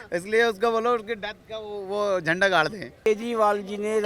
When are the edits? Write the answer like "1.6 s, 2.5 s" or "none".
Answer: 3.0 s